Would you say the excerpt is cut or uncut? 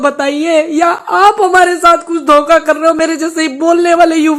uncut